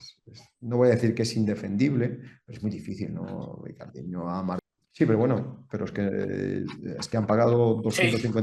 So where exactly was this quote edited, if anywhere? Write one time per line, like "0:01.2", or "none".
0:04.6